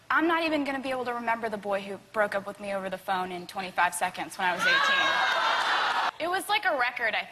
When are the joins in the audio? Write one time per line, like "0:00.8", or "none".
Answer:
none